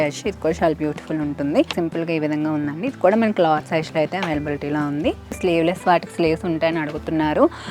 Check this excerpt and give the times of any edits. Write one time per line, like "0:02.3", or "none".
0:01.7
0:05.4